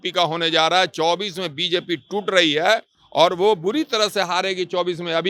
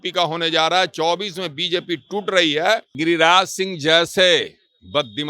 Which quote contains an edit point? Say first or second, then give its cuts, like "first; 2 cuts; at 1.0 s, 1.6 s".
second; 1 cut; at 3.0 s